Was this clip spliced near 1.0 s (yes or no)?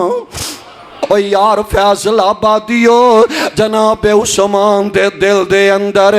yes